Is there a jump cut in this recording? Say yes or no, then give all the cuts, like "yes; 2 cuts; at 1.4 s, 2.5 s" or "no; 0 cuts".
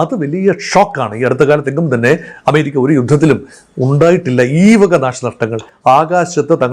yes; 1 cut; at 5.7 s